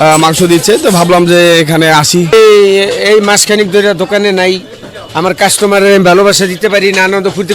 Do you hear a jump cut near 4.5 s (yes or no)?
no